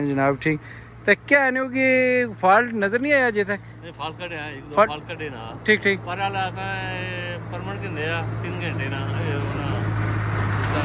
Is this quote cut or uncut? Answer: uncut